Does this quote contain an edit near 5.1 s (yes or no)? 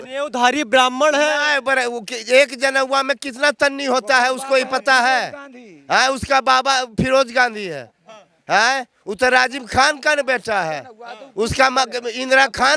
no